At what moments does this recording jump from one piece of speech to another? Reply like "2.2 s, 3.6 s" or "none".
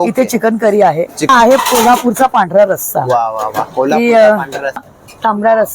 1.3 s, 4.8 s